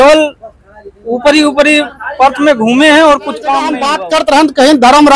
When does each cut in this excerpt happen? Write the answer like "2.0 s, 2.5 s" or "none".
3.9 s